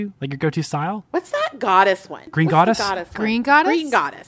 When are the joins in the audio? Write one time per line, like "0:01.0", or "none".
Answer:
0:01.0
0:02.2

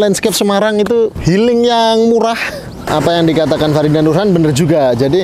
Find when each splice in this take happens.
0:01.2
0:02.9

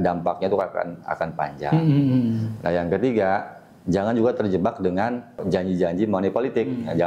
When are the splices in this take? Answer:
0:05.4

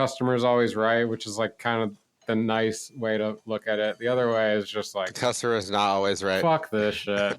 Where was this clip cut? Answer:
0:02.2
0:03.4

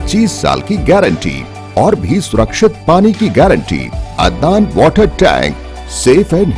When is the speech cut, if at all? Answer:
0:04.0

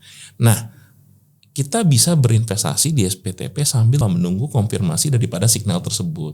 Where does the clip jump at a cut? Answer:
0:04.0

